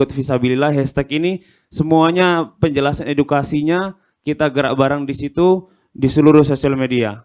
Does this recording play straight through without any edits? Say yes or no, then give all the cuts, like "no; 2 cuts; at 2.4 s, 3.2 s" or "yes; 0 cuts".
yes; 0 cuts